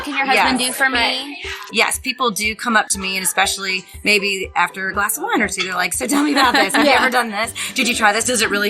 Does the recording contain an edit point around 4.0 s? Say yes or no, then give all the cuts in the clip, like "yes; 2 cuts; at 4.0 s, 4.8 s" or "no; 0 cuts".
no; 1 cut; at 1.6 s